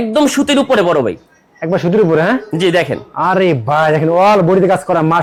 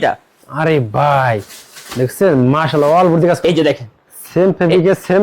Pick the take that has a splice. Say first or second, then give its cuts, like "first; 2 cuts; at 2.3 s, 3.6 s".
second; 1 cut; at 3.4 s